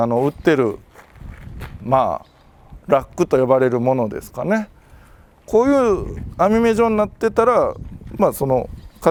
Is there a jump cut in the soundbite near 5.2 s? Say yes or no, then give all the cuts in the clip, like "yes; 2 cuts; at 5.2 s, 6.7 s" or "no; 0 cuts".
no; 0 cuts